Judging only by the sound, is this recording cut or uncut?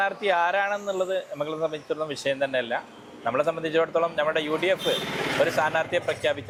uncut